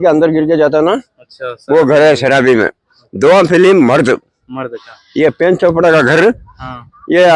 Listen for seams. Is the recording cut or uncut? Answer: uncut